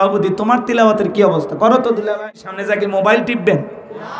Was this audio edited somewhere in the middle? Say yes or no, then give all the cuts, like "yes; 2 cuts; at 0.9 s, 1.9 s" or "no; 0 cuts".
yes; 1 cut; at 2.5 s